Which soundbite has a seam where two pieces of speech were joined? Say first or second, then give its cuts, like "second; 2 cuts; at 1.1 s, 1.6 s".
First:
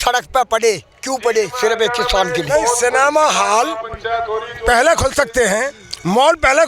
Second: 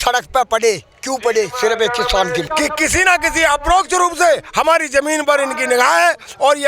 second; 1 cut; at 2.4 s